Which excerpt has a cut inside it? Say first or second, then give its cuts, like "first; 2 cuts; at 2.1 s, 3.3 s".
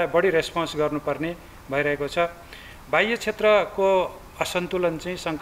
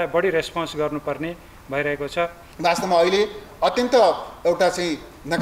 second; 1 cut; at 2.4 s